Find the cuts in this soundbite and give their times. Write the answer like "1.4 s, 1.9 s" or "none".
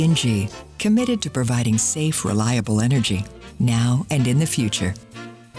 none